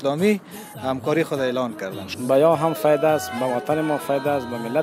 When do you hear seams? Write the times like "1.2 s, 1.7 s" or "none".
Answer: 2.0 s